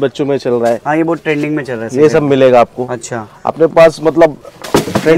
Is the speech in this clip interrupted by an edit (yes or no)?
no